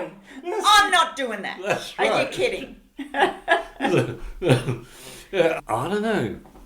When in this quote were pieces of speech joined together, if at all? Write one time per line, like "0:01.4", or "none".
0:05.6